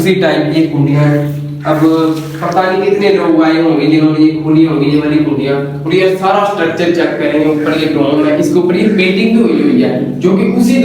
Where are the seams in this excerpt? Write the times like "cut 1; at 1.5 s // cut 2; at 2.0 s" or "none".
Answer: none